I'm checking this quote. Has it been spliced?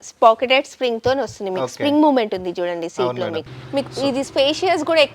yes; 1 cut; at 3.5 s

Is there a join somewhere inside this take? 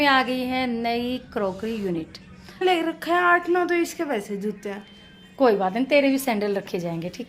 yes; 1 cut; at 2.6 s

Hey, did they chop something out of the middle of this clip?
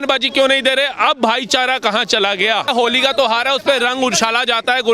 yes; 1 cut; at 2.7 s

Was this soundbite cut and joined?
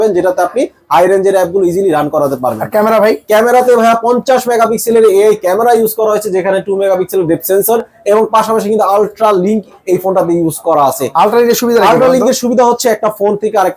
no; 0 cuts

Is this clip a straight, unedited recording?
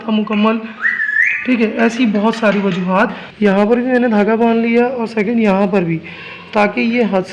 no; 1 cut; at 3.2 s

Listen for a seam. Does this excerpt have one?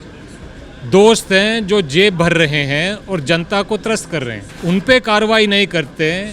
yes; 1 cut; at 4.4 s

